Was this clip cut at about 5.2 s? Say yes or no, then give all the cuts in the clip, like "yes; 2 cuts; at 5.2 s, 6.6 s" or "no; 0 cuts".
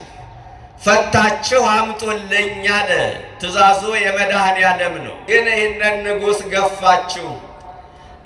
yes; 1 cut; at 5.2 s